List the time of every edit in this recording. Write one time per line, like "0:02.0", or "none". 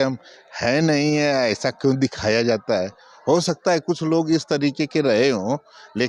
none